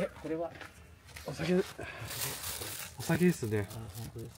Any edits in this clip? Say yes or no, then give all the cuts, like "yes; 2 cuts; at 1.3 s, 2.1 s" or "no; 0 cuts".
no; 0 cuts